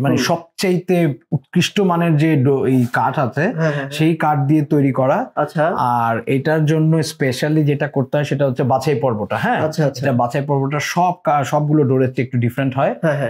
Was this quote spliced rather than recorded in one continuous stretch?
no; 0 cuts

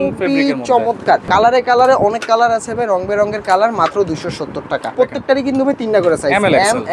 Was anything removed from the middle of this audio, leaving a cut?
yes; 2 cuts; at 1.3 s, 4.9 s

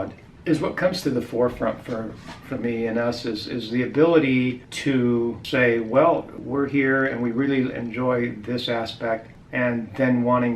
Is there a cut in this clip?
yes; 4 cuts; at 4.7 s, 5.4 s, 6.4 s, 9.4 s

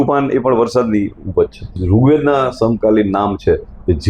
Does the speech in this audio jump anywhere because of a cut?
yes; 1 cut; at 1.8 s

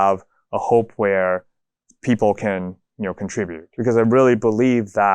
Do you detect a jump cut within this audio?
yes; 1 cut; at 3.7 s

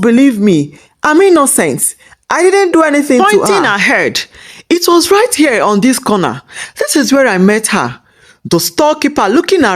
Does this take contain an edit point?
yes; 1 cut; at 3.2 s

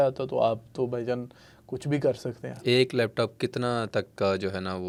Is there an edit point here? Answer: no; 0 cuts

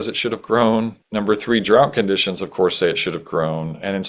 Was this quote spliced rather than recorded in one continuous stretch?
yes; 1 cut; at 1.0 s

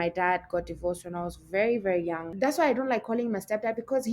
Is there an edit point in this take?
yes; 1 cut; at 2.3 s

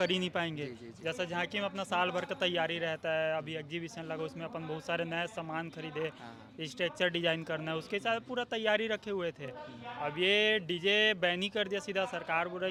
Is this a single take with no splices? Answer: yes; 0 cuts

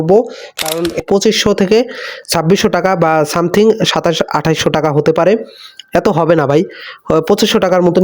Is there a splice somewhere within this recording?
yes; 1 cut; at 1.0 s

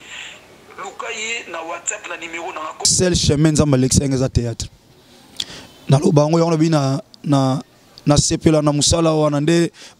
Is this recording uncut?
no; 1 cut; at 2.9 s

